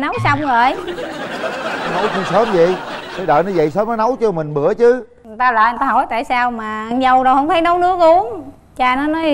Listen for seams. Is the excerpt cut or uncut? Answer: uncut